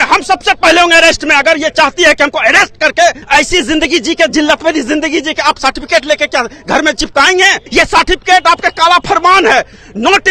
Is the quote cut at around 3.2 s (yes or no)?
yes